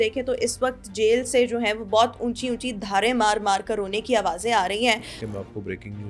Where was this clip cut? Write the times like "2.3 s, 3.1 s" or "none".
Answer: 5.2 s